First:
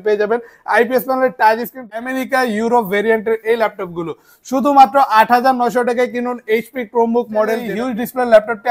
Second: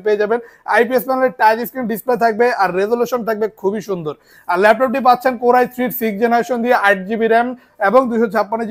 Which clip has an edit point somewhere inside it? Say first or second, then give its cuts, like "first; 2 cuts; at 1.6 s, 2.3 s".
first; 2 cuts; at 2.0 s, 7.7 s